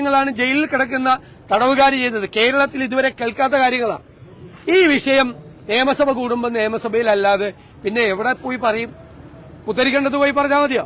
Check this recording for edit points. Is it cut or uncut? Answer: uncut